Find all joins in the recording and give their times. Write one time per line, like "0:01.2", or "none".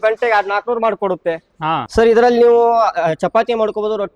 0:01.9

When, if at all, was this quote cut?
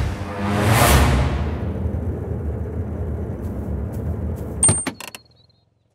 0:04.6

